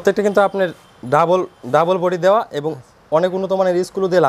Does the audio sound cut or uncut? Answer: uncut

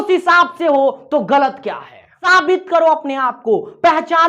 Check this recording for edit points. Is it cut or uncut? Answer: cut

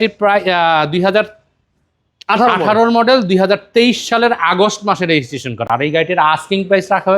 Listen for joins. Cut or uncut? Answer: uncut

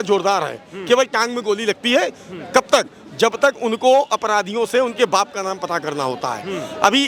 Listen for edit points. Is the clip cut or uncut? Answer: uncut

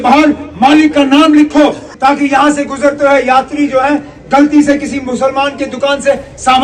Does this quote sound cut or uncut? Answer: uncut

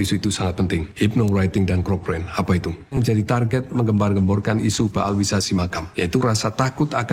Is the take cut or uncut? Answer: cut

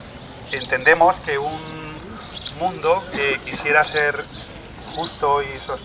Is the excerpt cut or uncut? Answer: uncut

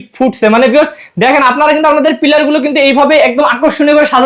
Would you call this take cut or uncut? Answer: uncut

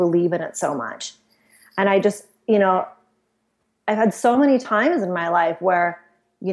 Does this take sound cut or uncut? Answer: uncut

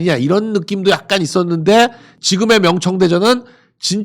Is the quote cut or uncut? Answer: cut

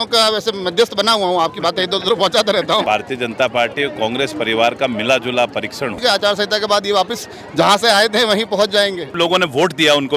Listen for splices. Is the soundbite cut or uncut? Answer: cut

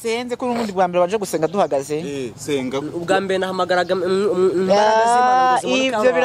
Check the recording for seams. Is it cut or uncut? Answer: uncut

